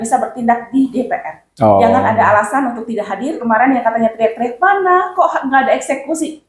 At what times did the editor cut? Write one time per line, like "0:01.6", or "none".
0:03.4